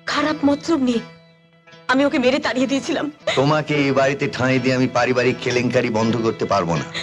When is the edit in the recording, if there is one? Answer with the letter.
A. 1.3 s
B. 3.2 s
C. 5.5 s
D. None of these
B